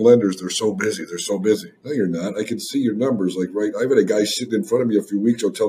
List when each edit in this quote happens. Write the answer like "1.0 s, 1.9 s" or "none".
1.7 s